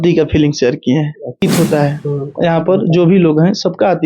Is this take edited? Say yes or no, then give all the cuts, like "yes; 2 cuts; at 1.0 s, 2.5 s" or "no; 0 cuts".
yes; 1 cut; at 1.4 s